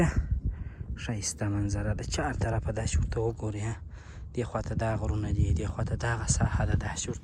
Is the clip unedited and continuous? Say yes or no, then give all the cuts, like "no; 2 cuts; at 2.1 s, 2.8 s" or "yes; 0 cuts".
yes; 0 cuts